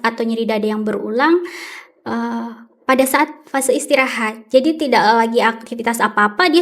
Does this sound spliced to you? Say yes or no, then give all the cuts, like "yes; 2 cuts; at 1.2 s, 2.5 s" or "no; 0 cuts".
no; 0 cuts